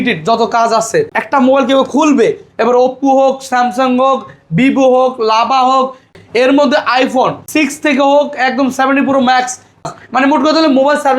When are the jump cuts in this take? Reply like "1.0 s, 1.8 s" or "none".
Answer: 1.2 s, 6.1 s, 7.4 s, 9.8 s